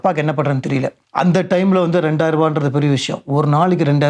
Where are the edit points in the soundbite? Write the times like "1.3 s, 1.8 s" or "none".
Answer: 1.0 s